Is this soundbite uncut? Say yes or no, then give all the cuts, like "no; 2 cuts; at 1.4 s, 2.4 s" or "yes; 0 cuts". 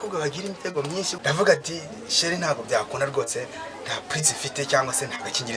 no; 1 cut; at 1.1 s